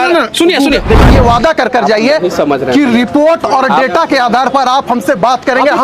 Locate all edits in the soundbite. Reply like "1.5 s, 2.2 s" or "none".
1.0 s